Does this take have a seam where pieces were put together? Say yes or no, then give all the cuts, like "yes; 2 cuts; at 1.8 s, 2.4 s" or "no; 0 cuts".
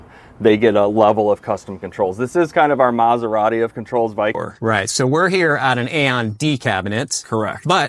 yes; 1 cut; at 4.4 s